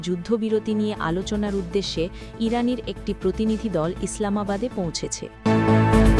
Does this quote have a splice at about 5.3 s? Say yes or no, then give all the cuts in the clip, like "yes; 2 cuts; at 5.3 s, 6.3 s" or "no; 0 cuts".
yes; 1 cut; at 5.3 s